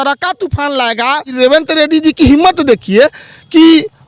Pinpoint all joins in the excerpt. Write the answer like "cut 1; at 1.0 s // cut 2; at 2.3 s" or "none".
cut 1; at 1.3 s